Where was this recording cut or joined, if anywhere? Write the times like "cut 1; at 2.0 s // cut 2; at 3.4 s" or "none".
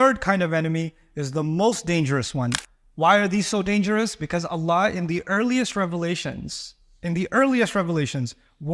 cut 1; at 2.6 s